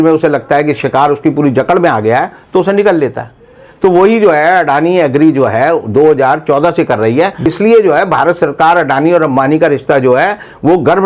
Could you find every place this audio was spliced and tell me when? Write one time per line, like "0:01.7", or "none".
0:07.5